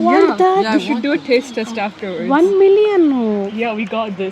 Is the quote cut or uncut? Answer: uncut